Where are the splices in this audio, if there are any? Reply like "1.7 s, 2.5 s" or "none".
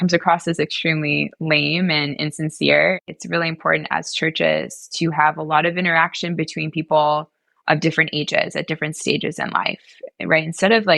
3.0 s